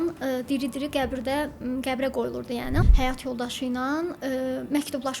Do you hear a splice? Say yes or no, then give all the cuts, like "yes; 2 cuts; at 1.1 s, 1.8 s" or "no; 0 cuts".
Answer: yes; 1 cut; at 2.8 s